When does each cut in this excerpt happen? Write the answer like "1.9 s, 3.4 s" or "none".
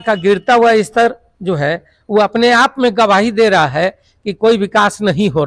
none